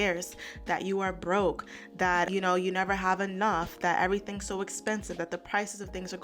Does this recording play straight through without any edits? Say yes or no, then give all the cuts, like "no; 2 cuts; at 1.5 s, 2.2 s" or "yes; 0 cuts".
no; 1 cut; at 2.3 s